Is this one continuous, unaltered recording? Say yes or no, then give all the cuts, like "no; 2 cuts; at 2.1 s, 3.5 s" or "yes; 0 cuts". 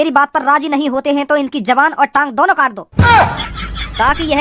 no; 1 cut; at 2.8 s